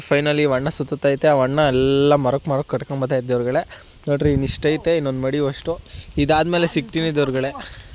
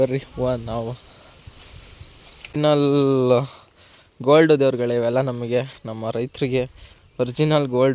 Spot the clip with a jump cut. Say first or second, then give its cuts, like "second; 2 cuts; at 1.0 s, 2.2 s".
second; 1 cut; at 2.6 s